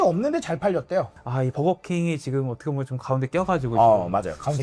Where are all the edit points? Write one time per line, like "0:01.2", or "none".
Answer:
0:01.2

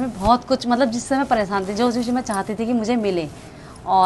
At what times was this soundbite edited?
none

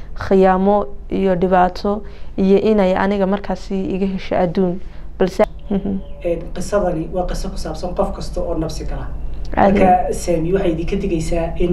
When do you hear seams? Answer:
0:05.4

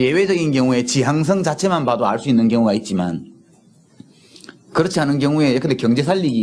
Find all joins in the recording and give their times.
0:01.4

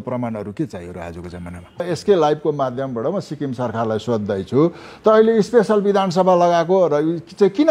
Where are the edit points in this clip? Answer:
0:01.8

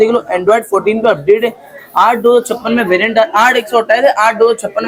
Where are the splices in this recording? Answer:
none

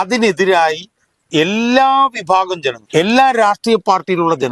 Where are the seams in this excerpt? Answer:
0:02.8

